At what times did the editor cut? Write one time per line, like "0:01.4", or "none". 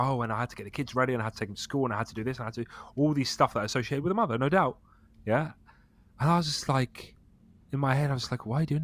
none